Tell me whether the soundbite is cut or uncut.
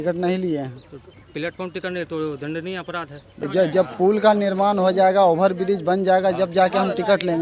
cut